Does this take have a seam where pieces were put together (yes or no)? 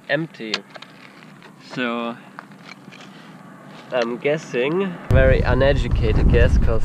no